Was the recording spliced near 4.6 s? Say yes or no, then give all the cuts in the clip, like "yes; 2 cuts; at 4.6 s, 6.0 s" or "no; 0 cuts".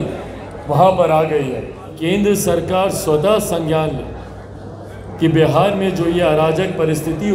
no; 1 cut; at 2.0 s